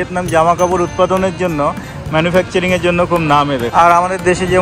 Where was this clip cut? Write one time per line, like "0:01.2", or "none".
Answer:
0:03.7